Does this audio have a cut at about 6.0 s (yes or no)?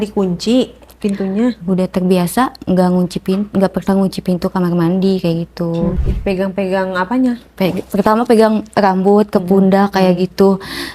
yes